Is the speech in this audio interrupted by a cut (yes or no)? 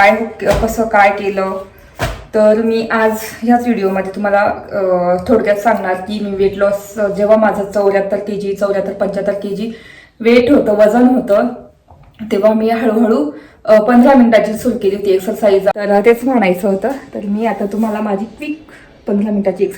yes